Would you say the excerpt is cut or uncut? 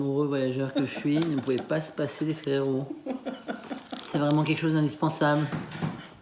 uncut